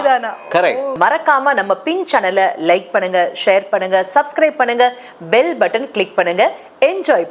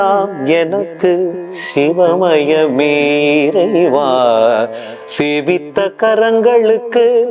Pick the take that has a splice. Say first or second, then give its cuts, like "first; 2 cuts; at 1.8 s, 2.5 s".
first; 1 cut; at 0.9 s